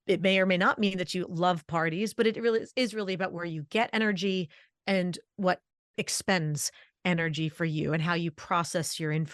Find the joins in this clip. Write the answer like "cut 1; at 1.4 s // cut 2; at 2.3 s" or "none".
cut 1; at 5.8 s